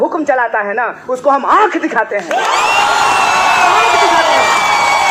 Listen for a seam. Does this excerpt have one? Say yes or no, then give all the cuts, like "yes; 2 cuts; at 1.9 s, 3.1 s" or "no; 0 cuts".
no; 0 cuts